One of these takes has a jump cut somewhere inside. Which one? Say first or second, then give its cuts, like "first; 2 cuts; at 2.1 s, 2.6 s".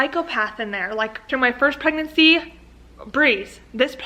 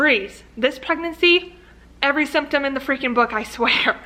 first; 1 cut; at 1.2 s